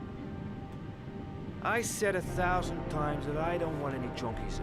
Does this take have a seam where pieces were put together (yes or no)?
yes